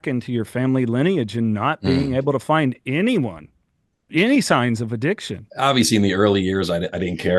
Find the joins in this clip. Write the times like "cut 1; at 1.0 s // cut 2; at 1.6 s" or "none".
cut 1; at 5.4 s